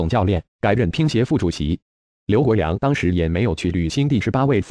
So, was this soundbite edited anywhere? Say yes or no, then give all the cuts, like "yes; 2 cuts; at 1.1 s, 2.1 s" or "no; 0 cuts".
yes; 1 cut; at 2.6 s